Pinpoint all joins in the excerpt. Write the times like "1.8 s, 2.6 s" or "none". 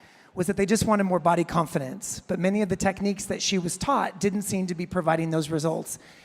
2.8 s